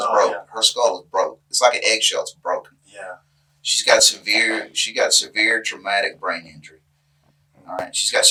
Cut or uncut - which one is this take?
uncut